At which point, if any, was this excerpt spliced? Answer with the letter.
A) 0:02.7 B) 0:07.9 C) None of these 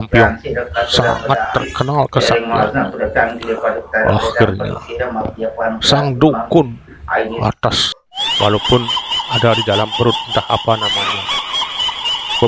B